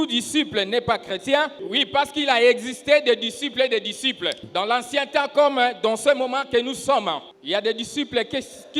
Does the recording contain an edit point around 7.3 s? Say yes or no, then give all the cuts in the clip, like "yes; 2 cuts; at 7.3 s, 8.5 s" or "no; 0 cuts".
yes; 3 cuts; at 1.6 s, 4.4 s, 7.3 s